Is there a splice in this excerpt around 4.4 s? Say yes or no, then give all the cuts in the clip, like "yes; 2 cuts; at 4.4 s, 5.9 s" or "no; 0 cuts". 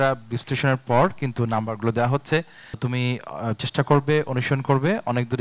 no; 1 cut; at 2.8 s